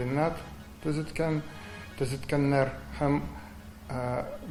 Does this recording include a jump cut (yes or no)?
no